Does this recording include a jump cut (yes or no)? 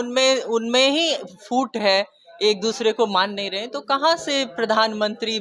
no